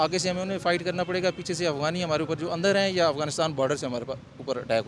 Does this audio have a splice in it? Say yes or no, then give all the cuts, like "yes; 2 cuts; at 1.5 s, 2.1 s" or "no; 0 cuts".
no; 0 cuts